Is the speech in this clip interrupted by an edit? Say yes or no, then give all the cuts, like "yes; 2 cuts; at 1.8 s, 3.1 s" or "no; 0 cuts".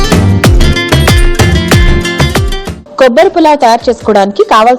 yes; 1 cut; at 2.6 s